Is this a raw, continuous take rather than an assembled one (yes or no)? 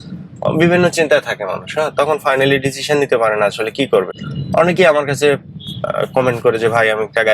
yes